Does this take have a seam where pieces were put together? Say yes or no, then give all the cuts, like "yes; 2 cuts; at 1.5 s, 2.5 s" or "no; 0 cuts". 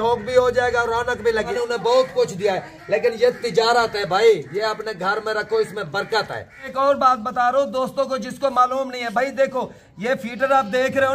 yes; 2 cuts; at 1.5 s, 6.6 s